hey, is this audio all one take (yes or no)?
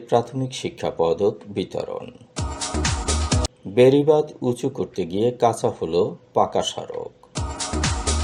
yes